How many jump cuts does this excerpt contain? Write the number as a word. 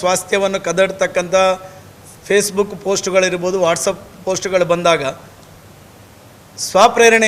zero